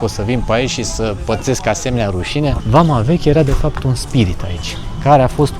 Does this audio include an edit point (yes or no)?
yes